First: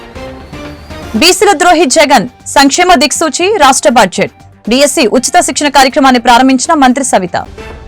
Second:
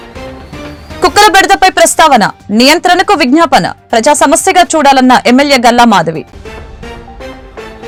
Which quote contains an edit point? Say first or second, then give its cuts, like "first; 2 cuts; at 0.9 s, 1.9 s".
first; 1 cut; at 1.0 s